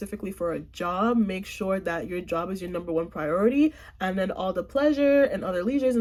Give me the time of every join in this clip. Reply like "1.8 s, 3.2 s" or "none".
none